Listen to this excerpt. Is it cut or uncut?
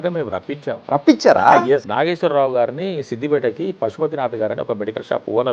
cut